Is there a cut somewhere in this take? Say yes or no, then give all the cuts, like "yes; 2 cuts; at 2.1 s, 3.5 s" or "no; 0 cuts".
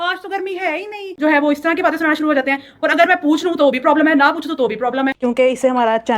yes; 2 cuts; at 1.2 s, 5.2 s